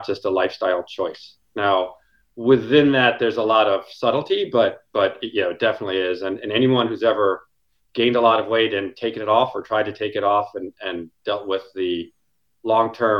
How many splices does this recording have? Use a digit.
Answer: 0